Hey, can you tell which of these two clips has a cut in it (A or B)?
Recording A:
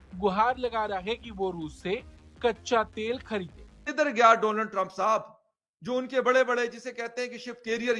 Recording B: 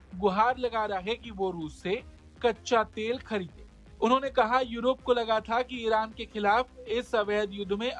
A